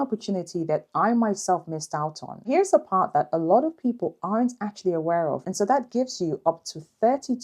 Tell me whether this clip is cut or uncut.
cut